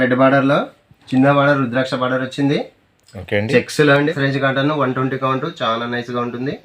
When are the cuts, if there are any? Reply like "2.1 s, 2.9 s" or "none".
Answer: 4.1 s